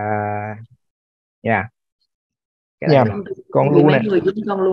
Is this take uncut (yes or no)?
no